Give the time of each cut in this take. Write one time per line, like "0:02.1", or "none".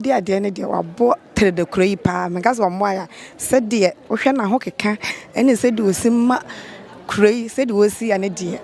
none